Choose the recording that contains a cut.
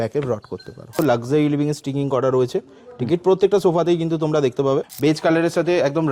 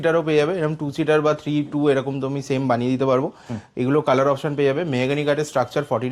first; 2 cuts; at 1.0 s, 4.9 s

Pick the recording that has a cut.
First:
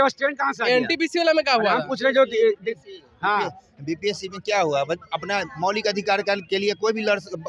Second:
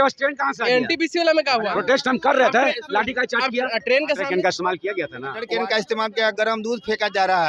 second; 3 cuts; at 1.7 s, 4.2 s, 5.5 s

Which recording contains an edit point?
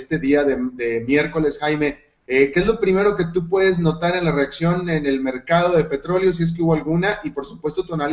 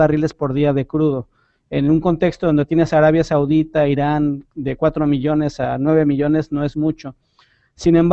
second; 1 cut; at 4.5 s

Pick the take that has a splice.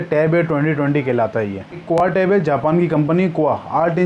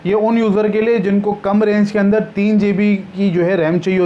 first; 1 cut; at 1.8 s

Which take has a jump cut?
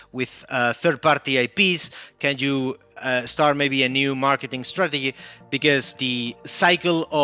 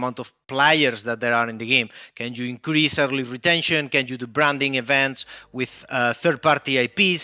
first; 1 cut; at 6.0 s

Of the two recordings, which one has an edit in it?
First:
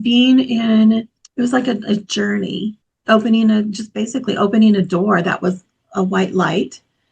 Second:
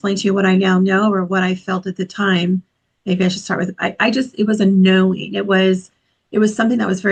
first; 2 cuts; at 1.2 s, 2.8 s

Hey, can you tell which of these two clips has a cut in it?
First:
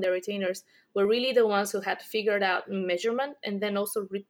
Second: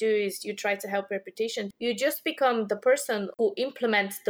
second; 2 cuts; at 1.7 s, 3.4 s

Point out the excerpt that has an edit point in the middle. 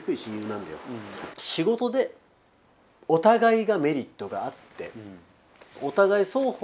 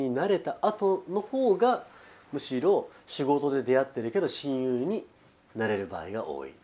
first; 1 cut; at 1.3 s

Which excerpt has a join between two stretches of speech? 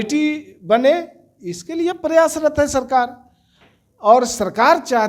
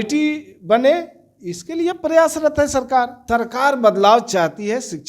second; 1 cut; at 3.2 s

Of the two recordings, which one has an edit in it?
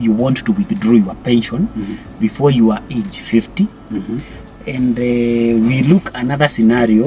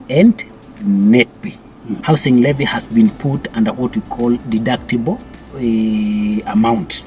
second; 1 cut; at 1.9 s

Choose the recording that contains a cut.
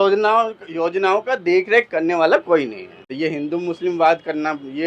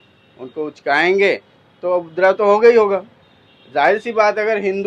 first; 1 cut; at 3.1 s

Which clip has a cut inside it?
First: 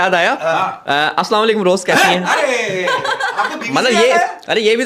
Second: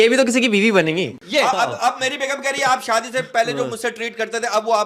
second; 1 cut; at 1.1 s

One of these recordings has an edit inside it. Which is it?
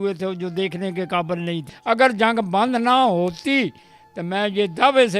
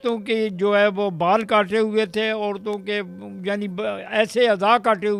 first; 1 cut; at 1.7 s

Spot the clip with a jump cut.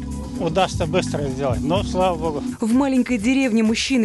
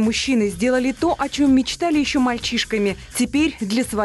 first; 1 cut; at 2.5 s

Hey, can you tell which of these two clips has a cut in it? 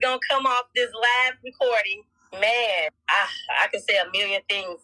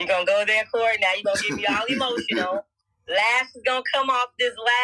first; 2 cuts; at 2.2 s, 3.0 s

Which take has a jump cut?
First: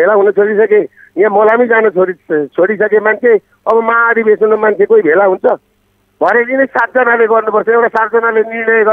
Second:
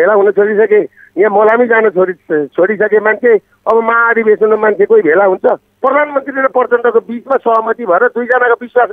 second; 1 cut; at 5.7 s

